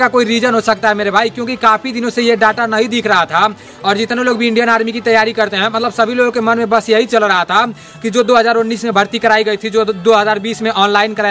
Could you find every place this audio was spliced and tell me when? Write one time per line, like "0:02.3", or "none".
none